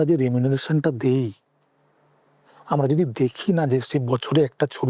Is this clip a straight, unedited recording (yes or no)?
yes